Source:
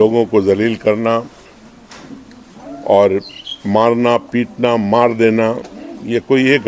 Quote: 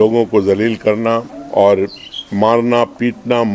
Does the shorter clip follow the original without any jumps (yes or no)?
no